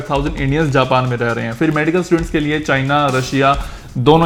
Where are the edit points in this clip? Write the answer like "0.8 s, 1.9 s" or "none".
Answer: none